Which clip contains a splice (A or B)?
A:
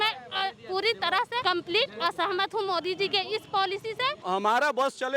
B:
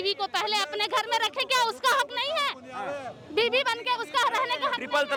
A